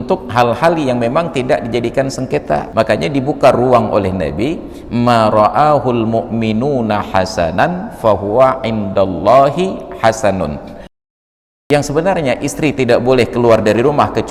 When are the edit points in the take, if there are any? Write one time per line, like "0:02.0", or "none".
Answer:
0:02.7
0:11.1